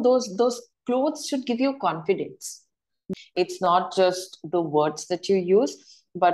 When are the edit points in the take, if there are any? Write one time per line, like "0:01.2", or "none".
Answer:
0:02.9